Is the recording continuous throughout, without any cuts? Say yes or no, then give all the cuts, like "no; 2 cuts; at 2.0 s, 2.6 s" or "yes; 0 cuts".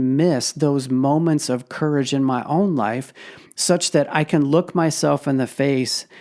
yes; 0 cuts